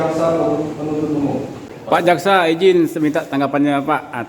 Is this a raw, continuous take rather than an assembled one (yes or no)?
no